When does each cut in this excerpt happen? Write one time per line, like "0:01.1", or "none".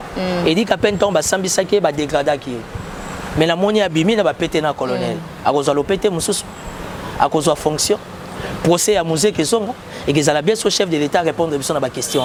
none